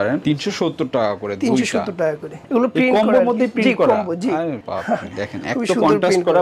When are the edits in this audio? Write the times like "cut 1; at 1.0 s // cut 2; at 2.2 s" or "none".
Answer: cut 1; at 2.5 s